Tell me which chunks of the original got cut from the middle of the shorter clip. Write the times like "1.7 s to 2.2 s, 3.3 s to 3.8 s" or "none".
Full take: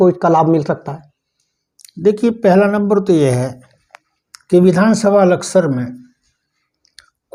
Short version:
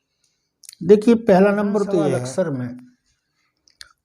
3.4 s to 5.4 s